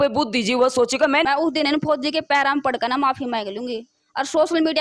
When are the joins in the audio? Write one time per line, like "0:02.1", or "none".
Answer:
0:01.2